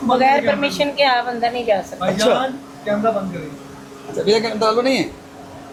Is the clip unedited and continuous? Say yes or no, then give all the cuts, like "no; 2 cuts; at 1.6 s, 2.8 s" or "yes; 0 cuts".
yes; 0 cuts